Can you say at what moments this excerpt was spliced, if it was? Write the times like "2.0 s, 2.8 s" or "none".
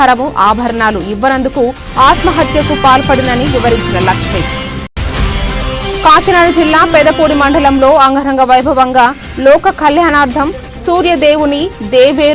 none